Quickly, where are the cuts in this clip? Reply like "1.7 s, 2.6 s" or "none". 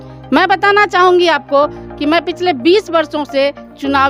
none